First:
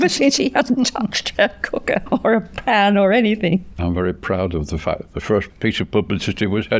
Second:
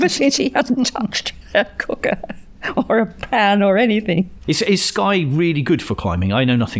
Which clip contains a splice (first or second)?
first